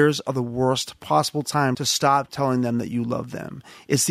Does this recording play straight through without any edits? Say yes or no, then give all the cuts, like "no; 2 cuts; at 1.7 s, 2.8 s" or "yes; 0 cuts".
no; 1 cut; at 1.0 s